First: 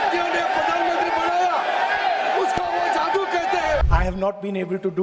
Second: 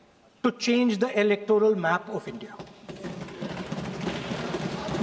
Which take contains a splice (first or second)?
first